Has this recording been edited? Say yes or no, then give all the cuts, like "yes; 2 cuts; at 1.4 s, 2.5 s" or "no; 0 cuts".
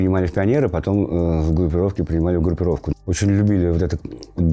yes; 1 cut; at 2.9 s